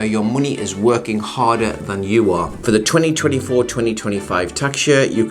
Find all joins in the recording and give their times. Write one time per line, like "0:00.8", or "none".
0:02.6